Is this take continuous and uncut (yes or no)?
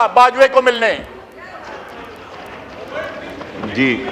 yes